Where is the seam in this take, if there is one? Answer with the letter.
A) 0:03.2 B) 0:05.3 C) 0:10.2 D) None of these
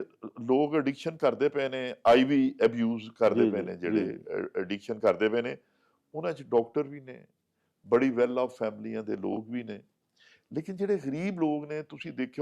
D